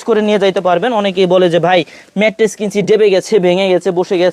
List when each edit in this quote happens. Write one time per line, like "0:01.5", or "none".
none